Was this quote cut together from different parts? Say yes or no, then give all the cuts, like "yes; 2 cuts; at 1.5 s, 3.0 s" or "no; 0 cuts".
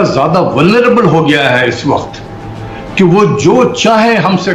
no; 0 cuts